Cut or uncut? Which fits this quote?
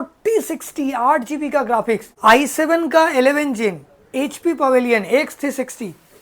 cut